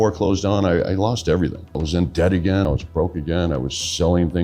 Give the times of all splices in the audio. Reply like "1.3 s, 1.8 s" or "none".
1.8 s, 2.7 s